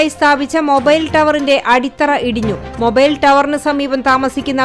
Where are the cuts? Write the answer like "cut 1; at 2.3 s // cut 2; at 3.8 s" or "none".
none